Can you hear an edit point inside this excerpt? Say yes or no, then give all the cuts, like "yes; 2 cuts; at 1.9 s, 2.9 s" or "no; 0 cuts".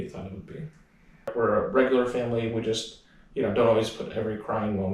yes; 1 cut; at 1.3 s